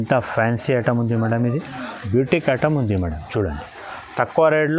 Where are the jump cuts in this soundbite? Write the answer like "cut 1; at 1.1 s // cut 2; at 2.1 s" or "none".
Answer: none